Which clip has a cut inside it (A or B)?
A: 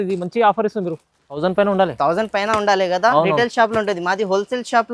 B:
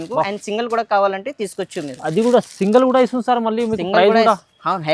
A